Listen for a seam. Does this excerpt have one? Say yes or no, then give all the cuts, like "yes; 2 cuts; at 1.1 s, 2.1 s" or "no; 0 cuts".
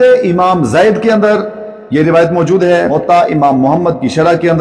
yes; 1 cut; at 2.9 s